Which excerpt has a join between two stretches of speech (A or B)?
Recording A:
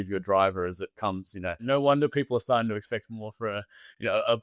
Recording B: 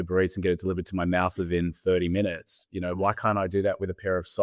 A